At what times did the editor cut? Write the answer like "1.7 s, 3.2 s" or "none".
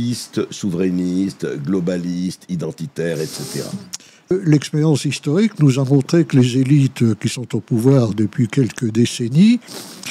4.3 s